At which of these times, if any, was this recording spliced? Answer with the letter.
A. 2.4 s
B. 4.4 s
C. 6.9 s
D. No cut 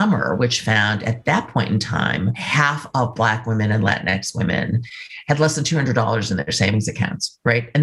A